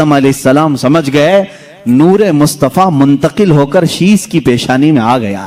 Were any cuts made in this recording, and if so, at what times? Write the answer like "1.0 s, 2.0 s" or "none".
none